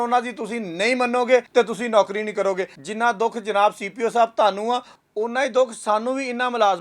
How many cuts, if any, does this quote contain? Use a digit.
2